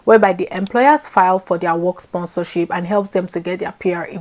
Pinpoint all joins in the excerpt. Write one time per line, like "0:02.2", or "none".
none